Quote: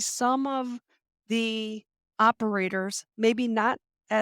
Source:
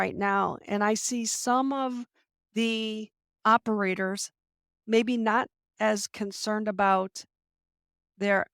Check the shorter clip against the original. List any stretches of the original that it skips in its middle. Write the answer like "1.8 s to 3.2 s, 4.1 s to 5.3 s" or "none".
4.3 s to 4.7 s